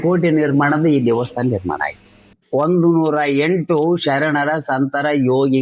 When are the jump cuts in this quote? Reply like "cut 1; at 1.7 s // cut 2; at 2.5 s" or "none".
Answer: cut 1; at 2.3 s